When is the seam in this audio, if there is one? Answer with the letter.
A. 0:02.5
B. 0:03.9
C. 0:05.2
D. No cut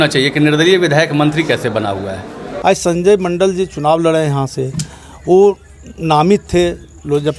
A